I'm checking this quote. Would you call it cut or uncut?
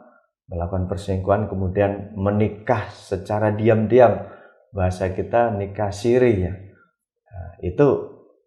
uncut